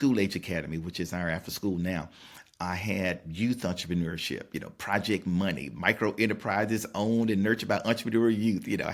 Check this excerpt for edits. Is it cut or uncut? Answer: uncut